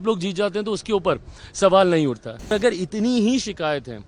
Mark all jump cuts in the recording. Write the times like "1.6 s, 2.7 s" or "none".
2.5 s